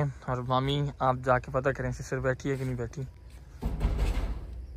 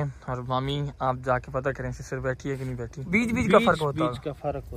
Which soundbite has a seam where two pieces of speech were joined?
second; 1 cut; at 3.1 s

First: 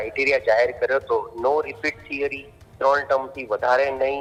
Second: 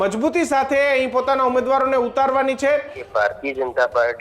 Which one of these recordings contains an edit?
second; 1 cut; at 3.0 s

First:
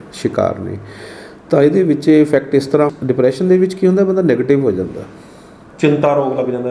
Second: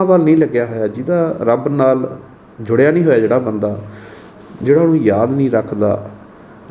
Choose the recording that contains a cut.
first; 1 cut; at 2.9 s

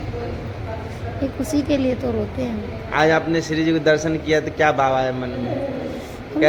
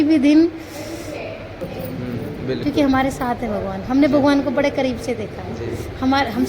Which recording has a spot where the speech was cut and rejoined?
second; 1 cut; at 1.7 s

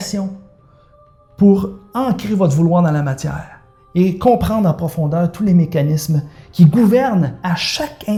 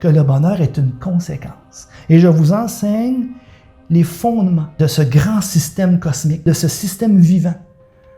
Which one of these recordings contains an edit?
second; 2 cuts; at 4.7 s, 6.4 s

